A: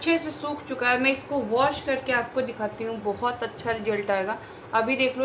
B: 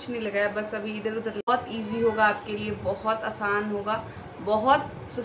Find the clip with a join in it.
B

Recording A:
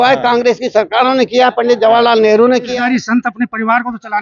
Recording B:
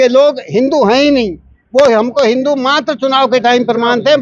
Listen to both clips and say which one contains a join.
A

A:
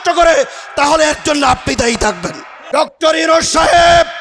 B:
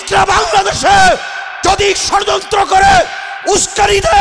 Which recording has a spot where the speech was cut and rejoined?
A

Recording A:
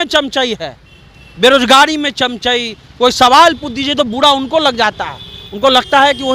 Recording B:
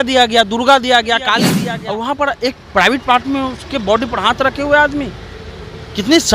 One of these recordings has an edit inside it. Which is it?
B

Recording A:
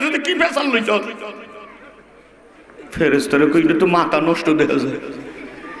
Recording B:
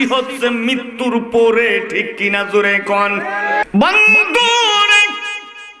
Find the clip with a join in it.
B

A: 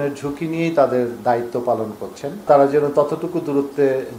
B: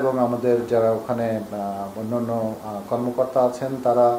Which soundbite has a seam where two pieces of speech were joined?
A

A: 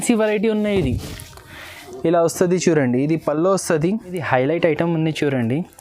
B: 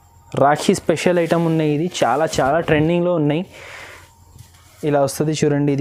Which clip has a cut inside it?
A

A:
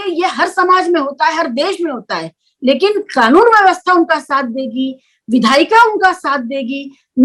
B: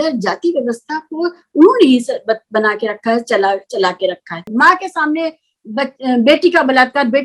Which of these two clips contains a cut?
B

